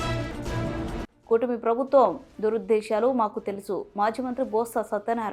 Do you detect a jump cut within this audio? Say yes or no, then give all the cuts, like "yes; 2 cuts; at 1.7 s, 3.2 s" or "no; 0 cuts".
yes; 1 cut; at 0.9 s